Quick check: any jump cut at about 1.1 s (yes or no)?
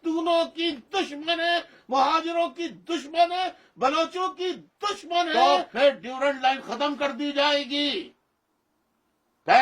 no